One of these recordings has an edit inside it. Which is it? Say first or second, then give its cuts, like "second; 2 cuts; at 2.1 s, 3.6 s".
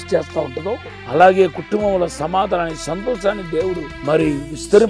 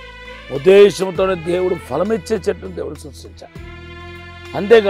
first; 2 cuts; at 0.9 s, 3.9 s